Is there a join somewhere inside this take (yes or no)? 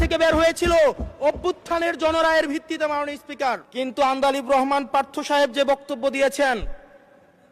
yes